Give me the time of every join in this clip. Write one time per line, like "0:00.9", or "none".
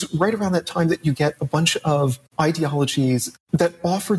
0:02.2